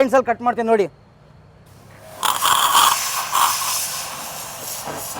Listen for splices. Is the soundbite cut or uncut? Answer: uncut